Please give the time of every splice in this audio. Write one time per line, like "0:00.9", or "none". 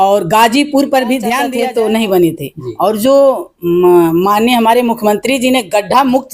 0:01.5